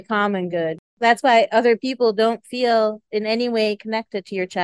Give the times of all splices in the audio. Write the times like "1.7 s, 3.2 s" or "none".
0.9 s